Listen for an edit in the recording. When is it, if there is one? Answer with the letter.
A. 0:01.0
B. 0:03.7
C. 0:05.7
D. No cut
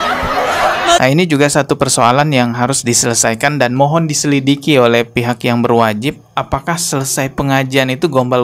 A